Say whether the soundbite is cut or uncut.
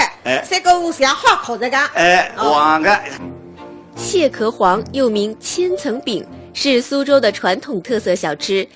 cut